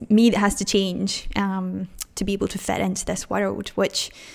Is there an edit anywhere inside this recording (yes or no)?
no